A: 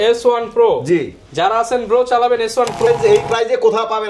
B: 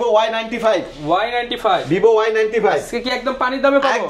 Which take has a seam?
A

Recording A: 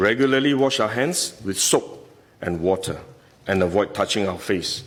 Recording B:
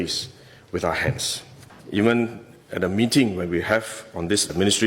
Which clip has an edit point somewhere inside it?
B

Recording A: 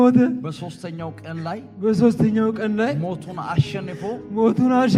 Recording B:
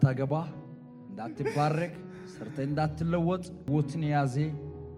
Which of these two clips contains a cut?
B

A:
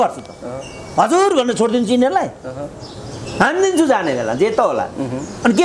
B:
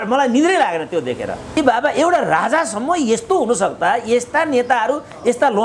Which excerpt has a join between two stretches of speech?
B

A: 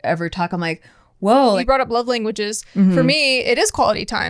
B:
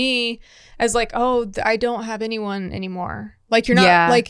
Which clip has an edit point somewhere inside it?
A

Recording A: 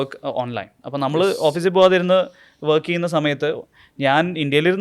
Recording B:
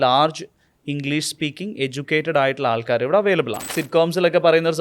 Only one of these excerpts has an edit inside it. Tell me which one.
B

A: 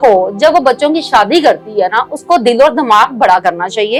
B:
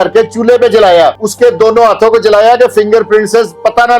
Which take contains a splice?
B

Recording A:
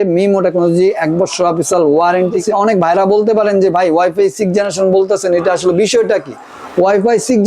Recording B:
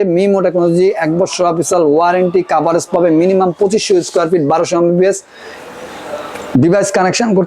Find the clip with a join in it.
A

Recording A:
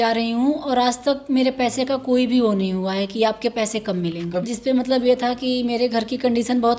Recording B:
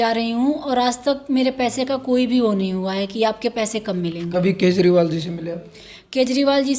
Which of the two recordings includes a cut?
A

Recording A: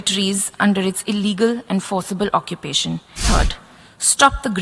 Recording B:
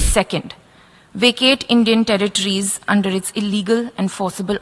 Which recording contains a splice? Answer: A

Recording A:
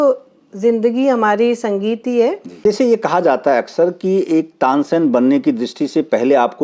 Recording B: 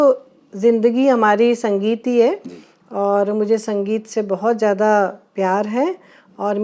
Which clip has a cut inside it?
A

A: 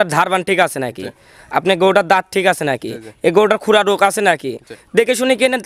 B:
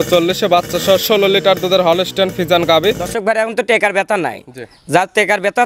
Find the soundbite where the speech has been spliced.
B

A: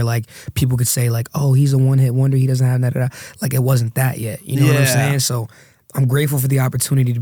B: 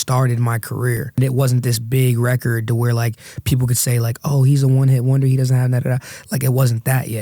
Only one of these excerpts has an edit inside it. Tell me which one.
B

